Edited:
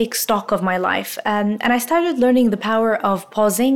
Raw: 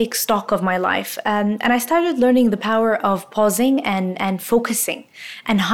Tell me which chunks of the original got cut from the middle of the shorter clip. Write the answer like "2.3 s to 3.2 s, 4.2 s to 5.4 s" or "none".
none